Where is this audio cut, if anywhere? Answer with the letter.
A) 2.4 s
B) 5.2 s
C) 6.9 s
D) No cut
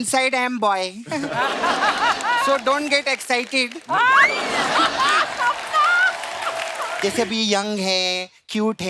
C